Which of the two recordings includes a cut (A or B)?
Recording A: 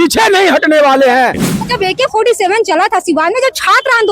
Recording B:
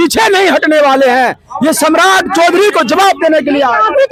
A